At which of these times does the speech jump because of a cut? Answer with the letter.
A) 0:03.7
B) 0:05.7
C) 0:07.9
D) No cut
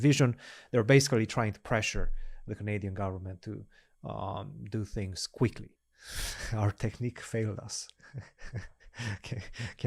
B